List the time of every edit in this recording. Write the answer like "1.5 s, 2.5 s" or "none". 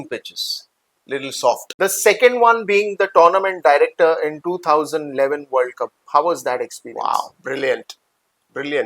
1.7 s

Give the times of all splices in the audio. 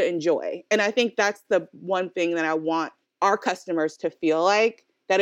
3.0 s

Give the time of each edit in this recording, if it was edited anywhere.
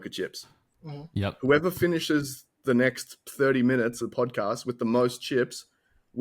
4.0 s

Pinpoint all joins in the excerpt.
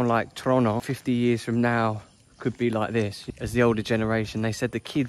0.9 s, 3.2 s

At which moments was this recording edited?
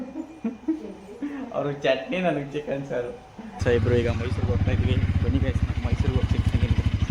3.6 s

